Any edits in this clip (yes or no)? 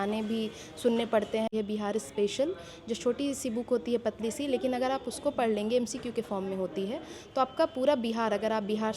yes